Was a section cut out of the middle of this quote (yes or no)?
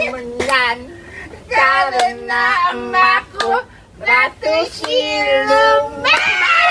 no